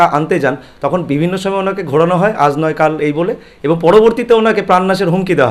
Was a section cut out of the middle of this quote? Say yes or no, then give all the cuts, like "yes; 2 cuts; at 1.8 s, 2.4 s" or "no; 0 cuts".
no; 0 cuts